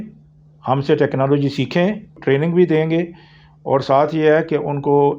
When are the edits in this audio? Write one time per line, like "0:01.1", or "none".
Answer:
0:02.2

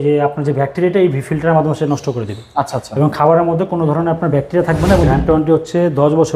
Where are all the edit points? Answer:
0:05.1

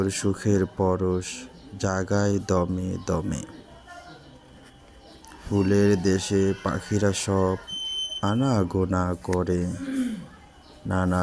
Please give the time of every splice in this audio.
none

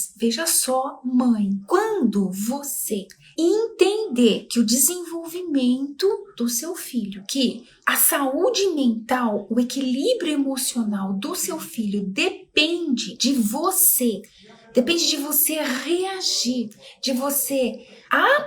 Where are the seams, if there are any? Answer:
none

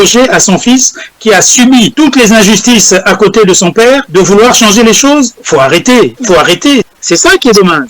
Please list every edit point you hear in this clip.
0:01.9
0:04.1
0:05.4
0:06.4

